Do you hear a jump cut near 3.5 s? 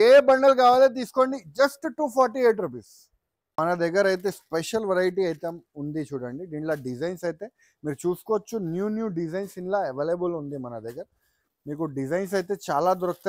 yes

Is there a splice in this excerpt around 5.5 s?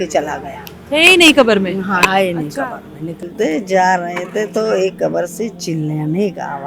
no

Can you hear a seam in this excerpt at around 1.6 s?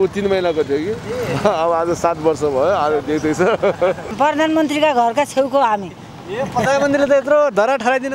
no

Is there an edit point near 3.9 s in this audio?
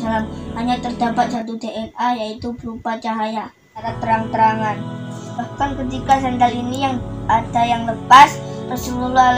yes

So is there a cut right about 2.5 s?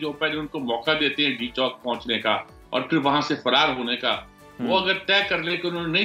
no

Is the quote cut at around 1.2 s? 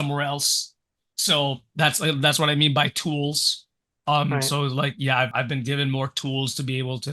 no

